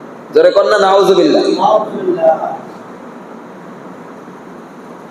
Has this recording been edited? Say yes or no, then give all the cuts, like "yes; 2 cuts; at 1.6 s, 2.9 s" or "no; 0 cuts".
no; 0 cuts